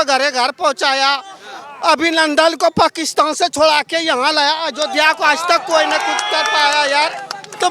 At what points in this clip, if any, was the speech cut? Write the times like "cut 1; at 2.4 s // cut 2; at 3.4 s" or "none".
none